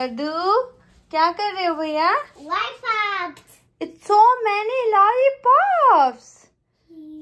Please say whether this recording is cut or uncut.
uncut